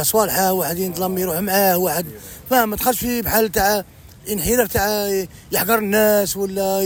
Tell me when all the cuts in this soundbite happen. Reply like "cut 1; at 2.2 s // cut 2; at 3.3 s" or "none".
none